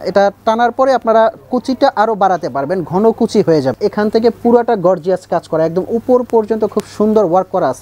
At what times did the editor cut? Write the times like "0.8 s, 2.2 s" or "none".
3.8 s